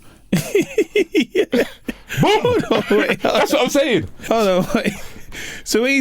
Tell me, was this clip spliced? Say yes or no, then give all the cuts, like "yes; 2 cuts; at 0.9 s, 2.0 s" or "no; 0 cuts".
yes; 1 cut; at 4.1 s